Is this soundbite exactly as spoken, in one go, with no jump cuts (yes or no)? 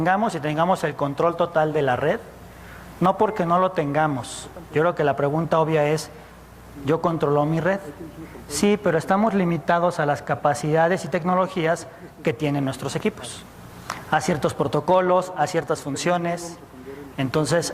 no